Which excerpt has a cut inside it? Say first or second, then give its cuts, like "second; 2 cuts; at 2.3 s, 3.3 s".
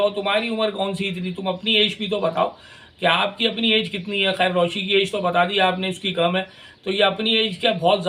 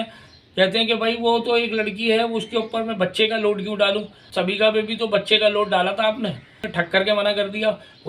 second; 2 cuts; at 4.2 s, 6.6 s